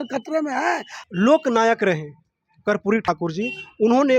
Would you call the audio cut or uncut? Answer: cut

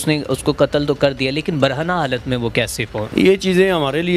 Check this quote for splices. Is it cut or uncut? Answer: cut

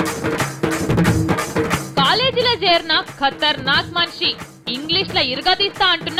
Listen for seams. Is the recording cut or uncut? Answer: uncut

